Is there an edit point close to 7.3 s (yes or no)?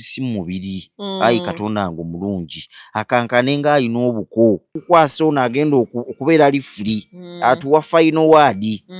no